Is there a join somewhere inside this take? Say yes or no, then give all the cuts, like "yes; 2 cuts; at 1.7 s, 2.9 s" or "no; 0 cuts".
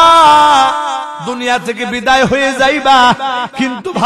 no; 0 cuts